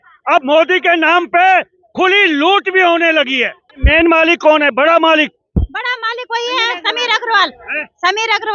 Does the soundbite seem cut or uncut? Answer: cut